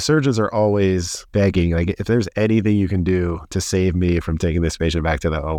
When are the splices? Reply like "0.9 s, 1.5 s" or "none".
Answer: 1.2 s